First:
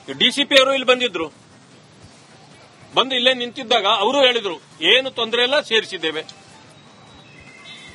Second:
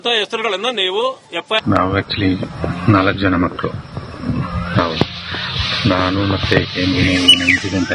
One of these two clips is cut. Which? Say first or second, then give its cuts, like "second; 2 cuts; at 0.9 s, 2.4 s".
second; 1 cut; at 1.1 s